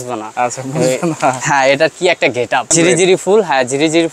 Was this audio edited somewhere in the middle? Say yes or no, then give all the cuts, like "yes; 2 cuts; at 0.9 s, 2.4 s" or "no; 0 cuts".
yes; 1 cut; at 2.7 s